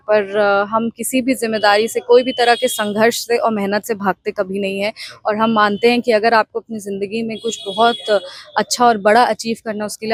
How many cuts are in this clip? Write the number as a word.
zero